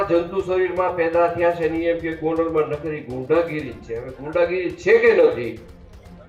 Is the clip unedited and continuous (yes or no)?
yes